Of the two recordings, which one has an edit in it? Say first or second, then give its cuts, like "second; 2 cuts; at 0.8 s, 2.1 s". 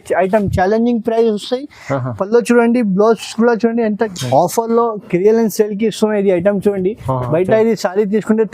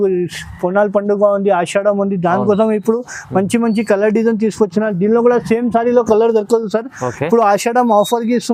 first; 1 cut; at 4.0 s